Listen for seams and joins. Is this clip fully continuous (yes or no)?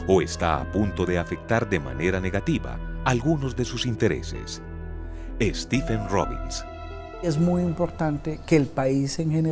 no